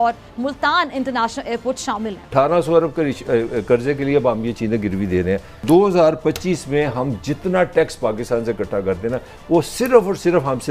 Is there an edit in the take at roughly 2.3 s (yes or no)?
yes